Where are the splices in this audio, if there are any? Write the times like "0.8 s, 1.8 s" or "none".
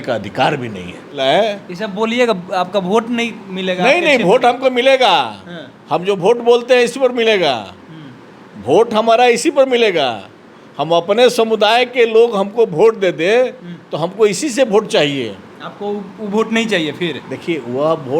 1.2 s